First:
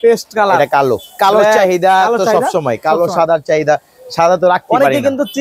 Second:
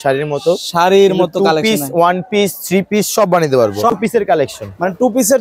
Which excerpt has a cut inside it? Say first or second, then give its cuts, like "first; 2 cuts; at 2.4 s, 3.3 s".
second; 1 cut; at 3.9 s